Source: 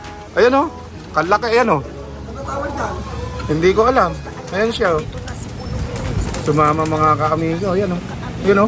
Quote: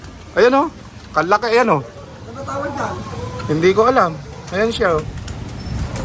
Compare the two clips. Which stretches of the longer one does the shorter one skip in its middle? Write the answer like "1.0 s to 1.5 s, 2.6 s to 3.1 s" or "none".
none